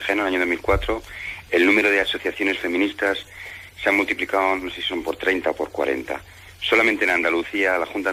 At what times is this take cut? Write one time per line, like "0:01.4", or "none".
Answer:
none